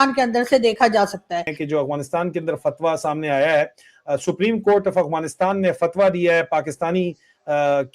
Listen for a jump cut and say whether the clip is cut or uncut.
cut